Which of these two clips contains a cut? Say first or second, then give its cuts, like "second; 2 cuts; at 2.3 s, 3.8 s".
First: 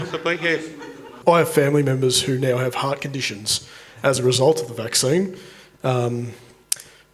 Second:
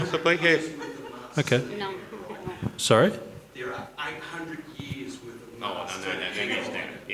first; 1 cut; at 1.1 s